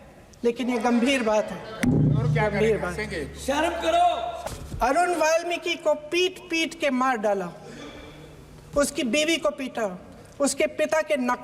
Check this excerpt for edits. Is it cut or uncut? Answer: cut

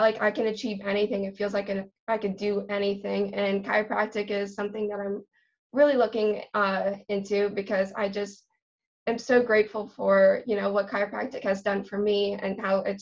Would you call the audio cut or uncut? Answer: uncut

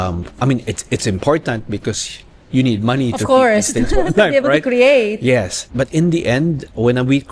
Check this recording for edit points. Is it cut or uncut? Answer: cut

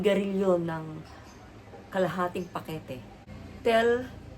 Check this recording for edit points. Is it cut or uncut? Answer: cut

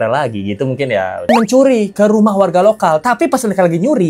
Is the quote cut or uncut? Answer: cut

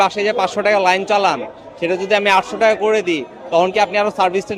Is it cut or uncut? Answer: uncut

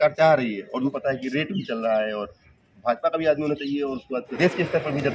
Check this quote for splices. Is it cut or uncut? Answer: cut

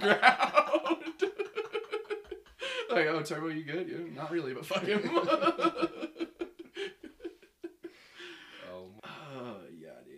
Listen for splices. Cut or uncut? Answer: cut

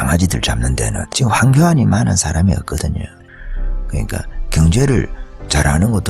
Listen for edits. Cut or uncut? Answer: cut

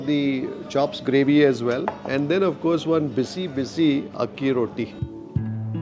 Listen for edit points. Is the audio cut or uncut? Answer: cut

